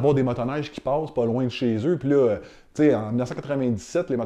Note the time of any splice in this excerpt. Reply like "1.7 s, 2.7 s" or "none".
none

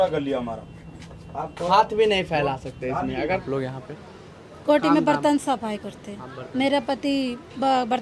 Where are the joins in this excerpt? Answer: 3.4 s

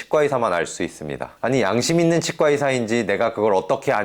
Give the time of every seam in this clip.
1.3 s

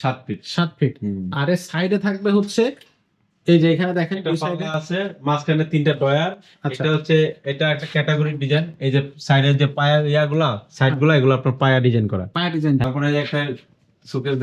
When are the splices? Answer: 12.8 s

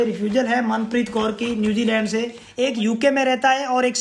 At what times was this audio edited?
2.4 s

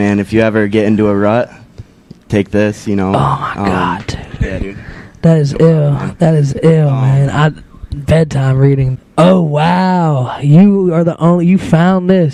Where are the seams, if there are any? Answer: none

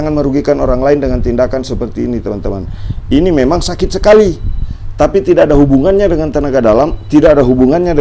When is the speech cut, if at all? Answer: none

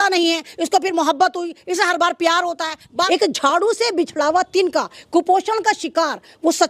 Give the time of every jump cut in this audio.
2.8 s

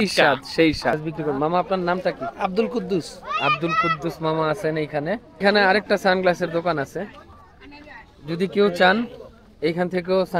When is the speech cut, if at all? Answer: 1.0 s, 5.4 s

